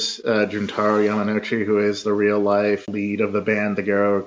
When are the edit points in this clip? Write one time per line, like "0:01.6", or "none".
0:02.9